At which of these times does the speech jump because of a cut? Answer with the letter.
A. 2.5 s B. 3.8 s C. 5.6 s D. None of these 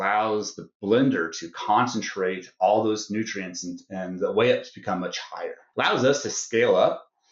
C